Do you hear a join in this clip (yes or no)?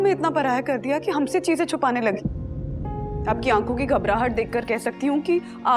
yes